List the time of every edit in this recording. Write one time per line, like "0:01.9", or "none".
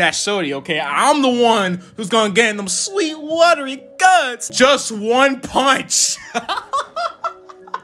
0:04.5